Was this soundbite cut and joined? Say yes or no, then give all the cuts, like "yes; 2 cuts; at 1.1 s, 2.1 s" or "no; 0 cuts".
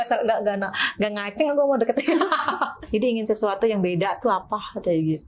yes; 1 cut; at 2.8 s